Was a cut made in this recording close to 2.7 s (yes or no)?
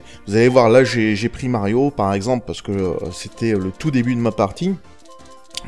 no